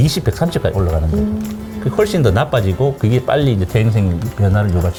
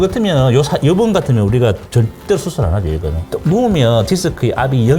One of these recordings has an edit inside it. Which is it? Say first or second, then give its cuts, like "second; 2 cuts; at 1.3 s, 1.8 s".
second; 1 cut; at 3.1 s